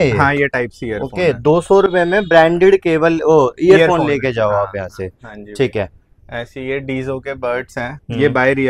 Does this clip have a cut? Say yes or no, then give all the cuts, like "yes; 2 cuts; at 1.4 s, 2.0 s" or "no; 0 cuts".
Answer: no; 0 cuts